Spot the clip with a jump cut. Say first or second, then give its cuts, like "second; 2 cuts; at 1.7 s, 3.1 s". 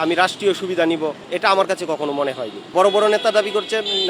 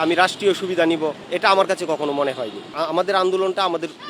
first; 1 cut; at 2.6 s